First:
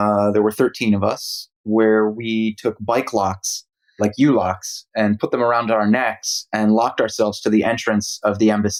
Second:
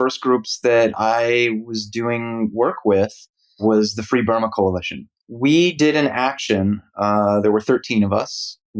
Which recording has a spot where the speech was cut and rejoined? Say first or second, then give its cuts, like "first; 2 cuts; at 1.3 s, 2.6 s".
second; 1 cut; at 5.3 s